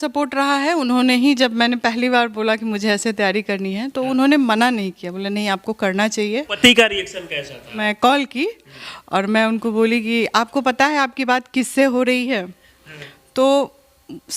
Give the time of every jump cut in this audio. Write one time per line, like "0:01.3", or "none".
0:06.5
0:07.9